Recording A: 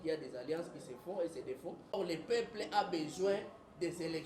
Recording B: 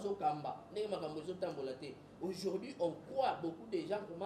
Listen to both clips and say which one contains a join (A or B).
A